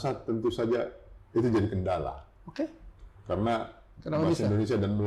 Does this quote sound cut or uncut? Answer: uncut